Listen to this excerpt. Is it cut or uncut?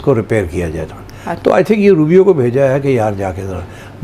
cut